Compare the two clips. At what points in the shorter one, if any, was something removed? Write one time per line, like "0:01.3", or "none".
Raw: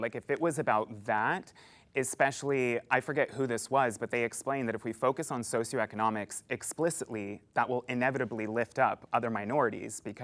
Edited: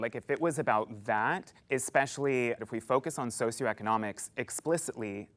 0:01.5
0:02.6